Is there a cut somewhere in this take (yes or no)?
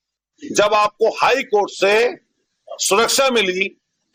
no